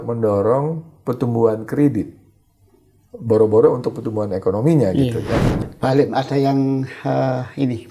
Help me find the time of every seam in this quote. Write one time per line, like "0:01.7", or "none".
0:05.5